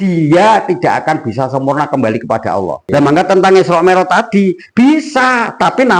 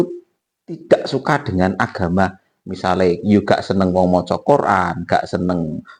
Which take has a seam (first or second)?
first